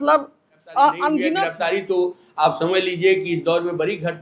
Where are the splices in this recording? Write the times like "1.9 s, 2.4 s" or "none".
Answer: 1.5 s